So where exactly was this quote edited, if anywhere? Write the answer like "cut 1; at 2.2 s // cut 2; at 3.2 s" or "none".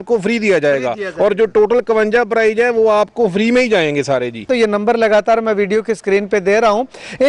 cut 1; at 4.5 s